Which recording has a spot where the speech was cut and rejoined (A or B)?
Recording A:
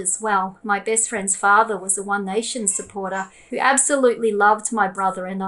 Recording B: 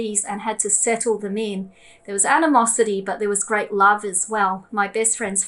A